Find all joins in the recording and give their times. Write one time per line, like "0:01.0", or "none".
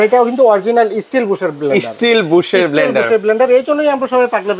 none